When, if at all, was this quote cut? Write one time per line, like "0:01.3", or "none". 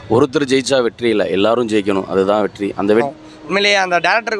0:03.1

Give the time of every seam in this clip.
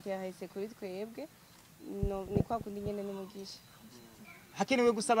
0:04.2

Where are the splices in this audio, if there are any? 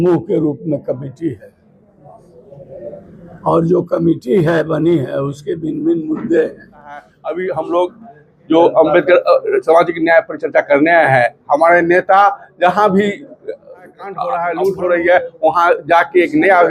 0:07.1
0:14.3

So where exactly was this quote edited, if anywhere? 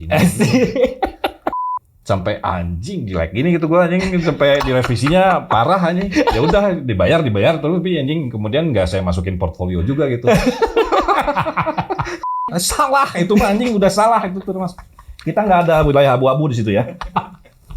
0:01.7
0:12.4

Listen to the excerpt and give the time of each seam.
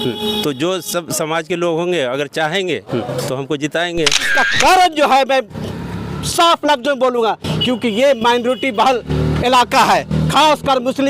0:04.4

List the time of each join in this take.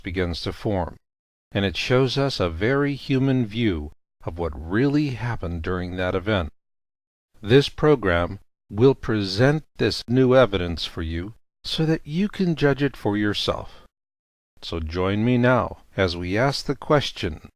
0:12.9

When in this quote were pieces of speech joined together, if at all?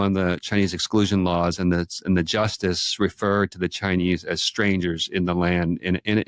none

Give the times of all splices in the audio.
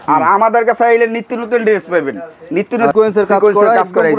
0:02.9

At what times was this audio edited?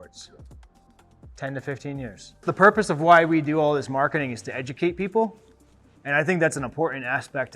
0:02.5

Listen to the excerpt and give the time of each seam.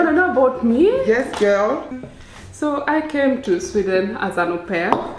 0:01.9

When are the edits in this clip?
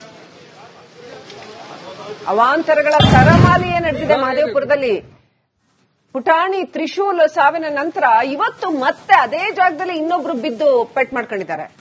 0:00.9

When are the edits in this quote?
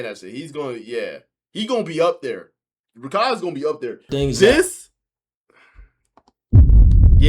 0:04.0

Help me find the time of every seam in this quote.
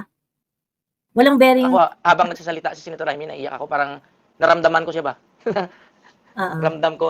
0:01.0

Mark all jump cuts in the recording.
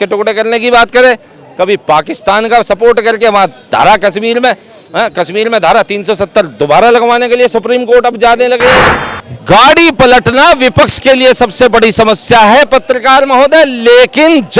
0:08.8

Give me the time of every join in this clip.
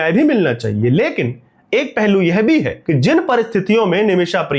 0:02.8

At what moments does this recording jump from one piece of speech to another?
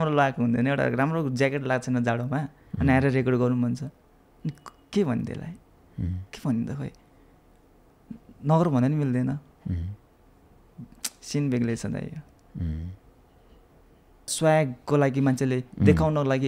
0:14.3

